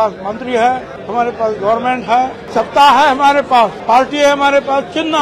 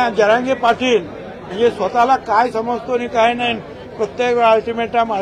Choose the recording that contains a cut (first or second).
first